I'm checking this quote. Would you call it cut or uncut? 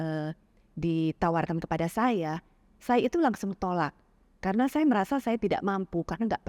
uncut